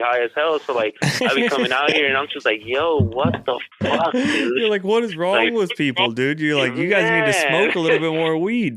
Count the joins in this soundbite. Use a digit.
0